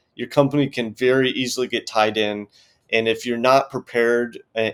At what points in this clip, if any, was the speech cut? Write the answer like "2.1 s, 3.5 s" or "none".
none